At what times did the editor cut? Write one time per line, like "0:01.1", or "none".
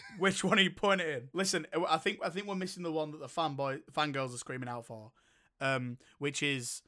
0:01.2